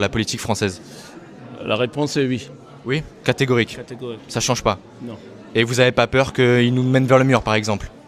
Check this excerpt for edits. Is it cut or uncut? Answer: uncut